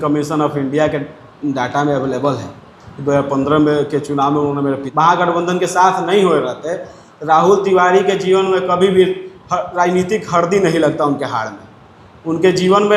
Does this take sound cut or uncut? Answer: cut